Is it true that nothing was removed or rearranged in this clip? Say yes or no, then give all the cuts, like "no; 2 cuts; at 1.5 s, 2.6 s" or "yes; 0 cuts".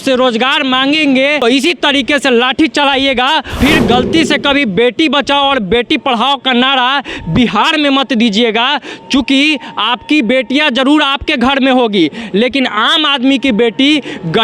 no; 2 cuts; at 1.4 s, 3.6 s